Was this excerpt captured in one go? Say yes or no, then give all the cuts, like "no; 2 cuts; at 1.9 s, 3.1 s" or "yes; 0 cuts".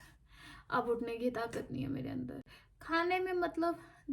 yes; 0 cuts